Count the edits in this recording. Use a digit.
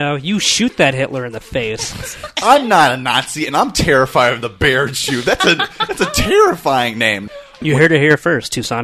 2